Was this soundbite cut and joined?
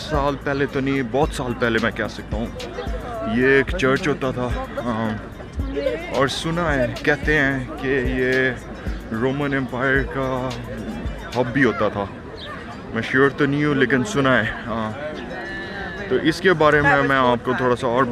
no; 0 cuts

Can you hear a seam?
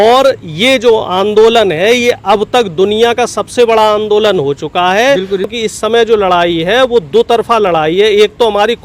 yes; 1 cut; at 5.5 s

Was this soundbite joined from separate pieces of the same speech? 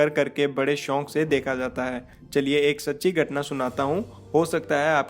yes; 1 cut; at 2.1 s

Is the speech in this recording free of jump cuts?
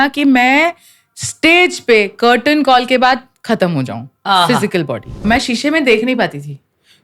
no; 1 cut; at 5.2 s

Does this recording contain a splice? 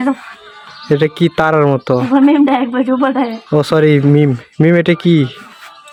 no; 0 cuts

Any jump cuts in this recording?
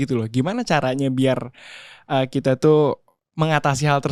no; 0 cuts

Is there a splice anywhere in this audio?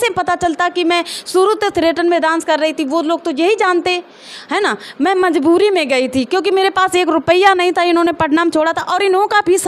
no; 0 cuts

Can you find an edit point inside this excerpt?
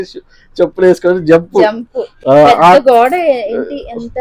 no; 0 cuts

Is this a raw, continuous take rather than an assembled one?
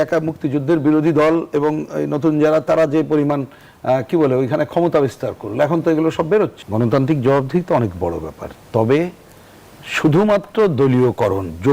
no; 1 cut; at 6.6 s

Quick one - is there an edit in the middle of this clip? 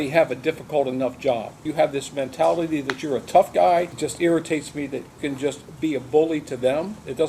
yes; 3 cuts; at 1.6 s, 3.9 s, 5.1 s

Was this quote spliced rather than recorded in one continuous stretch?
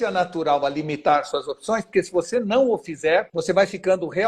yes; 1 cut; at 3.3 s

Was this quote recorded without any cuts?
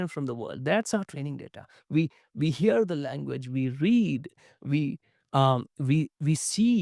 yes; 0 cuts

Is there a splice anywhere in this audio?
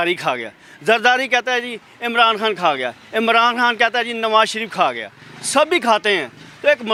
no; 0 cuts

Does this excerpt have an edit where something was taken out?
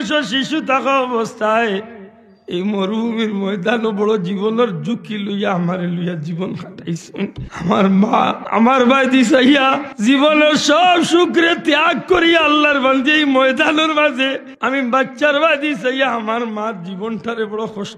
yes; 4 cuts; at 7.4 s, 8.4 s, 9.9 s, 14.5 s

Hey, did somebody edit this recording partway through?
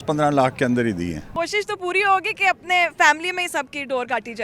yes; 1 cut; at 1.2 s

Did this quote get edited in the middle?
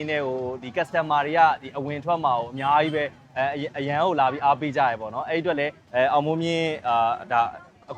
no; 0 cuts

